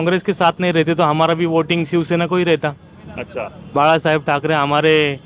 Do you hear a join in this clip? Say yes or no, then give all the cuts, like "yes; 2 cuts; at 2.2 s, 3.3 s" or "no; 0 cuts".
no; 0 cuts